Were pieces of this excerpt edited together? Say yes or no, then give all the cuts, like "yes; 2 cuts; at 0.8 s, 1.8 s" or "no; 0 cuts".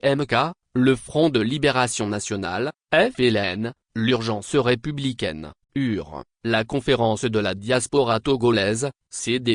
no; 0 cuts